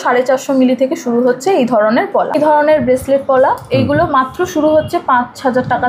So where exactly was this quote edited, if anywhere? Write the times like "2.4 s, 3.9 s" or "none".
2.4 s